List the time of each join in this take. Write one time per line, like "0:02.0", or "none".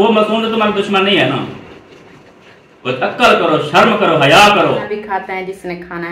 0:04.9